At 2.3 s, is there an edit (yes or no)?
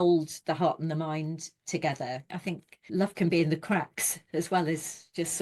yes